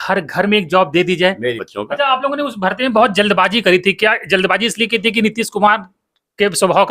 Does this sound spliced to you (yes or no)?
yes